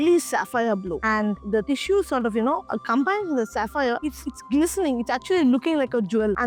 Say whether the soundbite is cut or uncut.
uncut